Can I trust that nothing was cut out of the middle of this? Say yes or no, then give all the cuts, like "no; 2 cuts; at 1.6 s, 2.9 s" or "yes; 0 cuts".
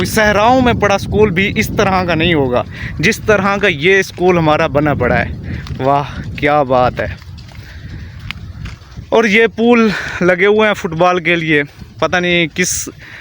yes; 0 cuts